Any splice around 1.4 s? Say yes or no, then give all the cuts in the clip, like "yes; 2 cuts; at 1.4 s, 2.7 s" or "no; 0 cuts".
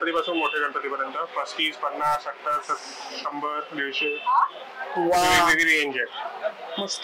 no; 0 cuts